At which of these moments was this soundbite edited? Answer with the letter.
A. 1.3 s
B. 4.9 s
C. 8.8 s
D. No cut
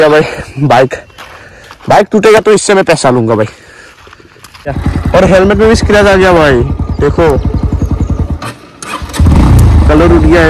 B